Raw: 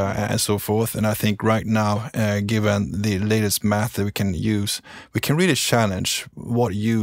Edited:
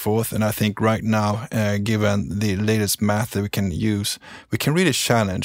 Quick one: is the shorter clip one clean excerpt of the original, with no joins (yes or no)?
yes